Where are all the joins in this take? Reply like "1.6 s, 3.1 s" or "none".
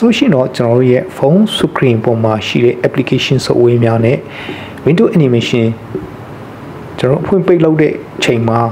none

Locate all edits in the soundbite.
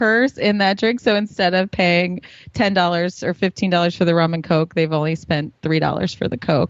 none

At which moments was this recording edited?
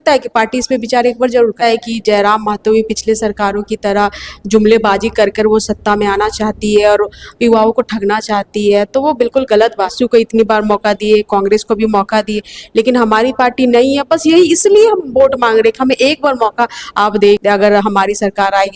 1.6 s, 9.9 s, 17.4 s

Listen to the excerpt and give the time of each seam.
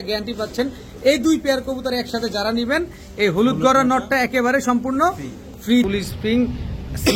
5.9 s

